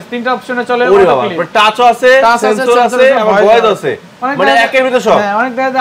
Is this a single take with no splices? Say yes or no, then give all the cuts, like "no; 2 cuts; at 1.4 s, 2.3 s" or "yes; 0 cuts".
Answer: yes; 0 cuts